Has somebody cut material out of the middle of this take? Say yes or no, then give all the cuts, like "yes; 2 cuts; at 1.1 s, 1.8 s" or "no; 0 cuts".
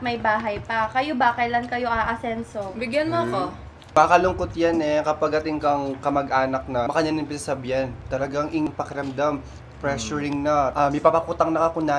yes; 4 cuts; at 3.9 s, 6.9 s, 8.7 s, 10.7 s